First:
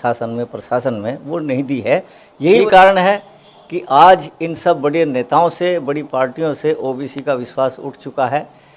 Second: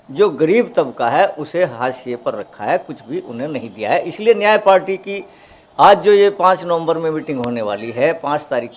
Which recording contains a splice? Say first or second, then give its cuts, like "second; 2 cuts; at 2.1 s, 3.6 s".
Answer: first; 1 cut; at 2.6 s